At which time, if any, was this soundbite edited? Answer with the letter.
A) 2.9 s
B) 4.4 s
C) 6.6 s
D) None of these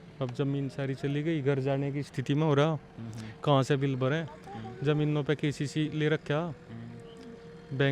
D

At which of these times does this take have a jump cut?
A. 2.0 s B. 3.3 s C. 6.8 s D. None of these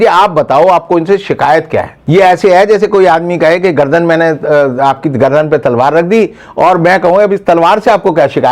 A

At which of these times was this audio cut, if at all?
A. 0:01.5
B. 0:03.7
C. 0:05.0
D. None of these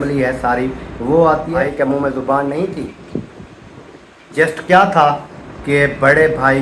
A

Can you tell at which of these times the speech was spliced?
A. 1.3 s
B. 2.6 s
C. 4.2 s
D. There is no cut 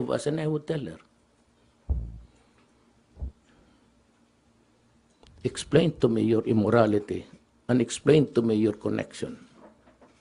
D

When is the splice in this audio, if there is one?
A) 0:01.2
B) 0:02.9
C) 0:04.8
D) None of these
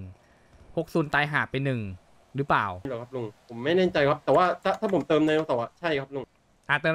B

